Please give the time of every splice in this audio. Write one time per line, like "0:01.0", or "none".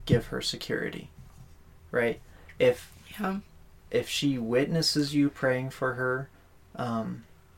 none